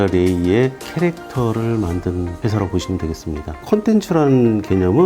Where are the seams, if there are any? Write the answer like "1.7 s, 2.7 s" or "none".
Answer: 0.8 s, 2.3 s, 3.5 s

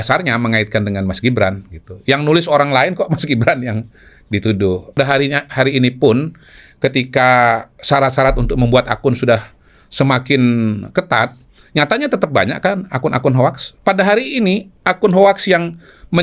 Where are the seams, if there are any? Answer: 5.0 s

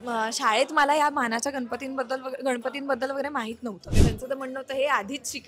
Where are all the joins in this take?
4.0 s

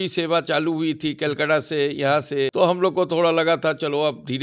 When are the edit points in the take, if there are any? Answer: 2.5 s

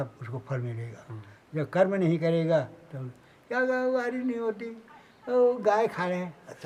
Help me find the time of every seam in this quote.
none

